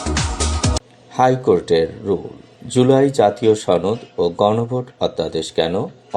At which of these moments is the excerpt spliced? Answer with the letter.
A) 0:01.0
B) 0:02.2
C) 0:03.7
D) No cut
A